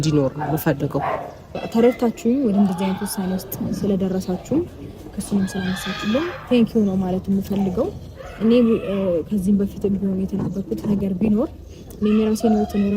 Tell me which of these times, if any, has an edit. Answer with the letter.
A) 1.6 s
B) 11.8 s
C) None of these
A